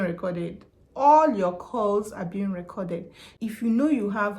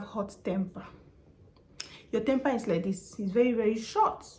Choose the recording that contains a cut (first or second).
first